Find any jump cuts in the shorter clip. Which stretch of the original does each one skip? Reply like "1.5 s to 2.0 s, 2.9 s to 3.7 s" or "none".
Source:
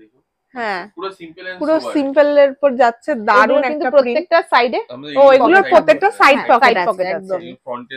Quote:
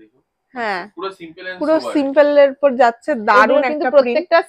none